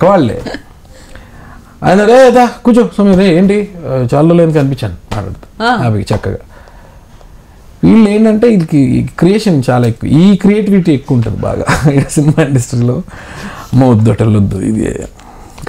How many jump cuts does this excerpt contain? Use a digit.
0